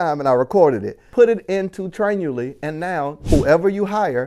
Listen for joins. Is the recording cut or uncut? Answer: cut